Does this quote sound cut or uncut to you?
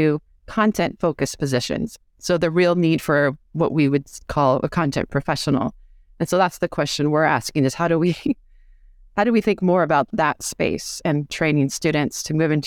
uncut